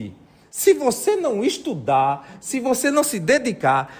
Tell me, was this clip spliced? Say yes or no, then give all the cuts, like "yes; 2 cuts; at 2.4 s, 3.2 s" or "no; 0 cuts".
no; 0 cuts